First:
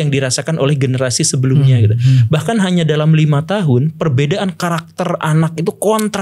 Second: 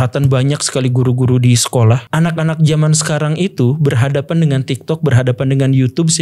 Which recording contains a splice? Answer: second; 1 cut; at 2.0 s

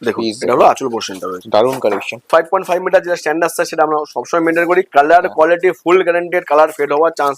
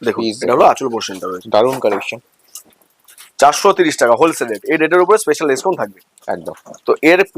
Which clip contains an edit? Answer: first; 1 cut; at 2.3 s

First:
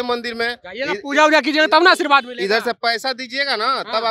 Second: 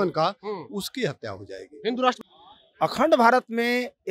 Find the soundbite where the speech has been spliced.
second; 1 cut; at 2.2 s

